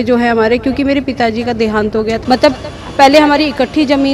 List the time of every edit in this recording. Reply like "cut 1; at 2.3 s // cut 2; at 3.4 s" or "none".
cut 1; at 2.2 s